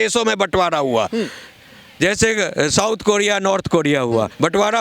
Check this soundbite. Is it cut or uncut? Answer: uncut